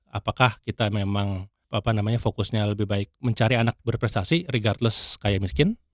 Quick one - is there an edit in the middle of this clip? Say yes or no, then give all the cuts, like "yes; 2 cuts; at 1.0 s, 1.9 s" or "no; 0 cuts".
yes; 1 cut; at 1.6 s